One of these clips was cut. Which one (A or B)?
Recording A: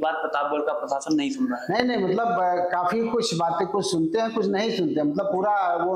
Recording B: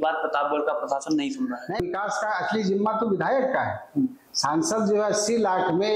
B